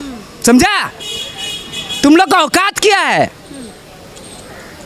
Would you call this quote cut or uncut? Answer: uncut